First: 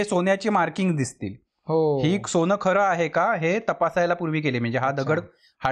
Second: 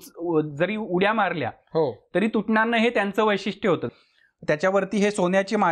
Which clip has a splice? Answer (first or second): second